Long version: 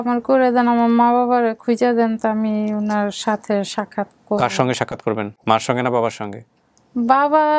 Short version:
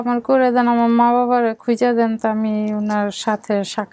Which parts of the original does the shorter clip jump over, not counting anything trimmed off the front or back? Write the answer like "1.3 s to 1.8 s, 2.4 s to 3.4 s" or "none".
none